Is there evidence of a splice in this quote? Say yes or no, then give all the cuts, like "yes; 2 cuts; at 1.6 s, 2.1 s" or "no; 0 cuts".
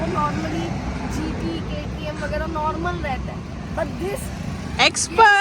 no; 0 cuts